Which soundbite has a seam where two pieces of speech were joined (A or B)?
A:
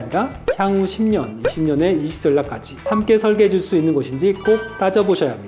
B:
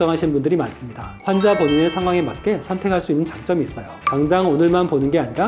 B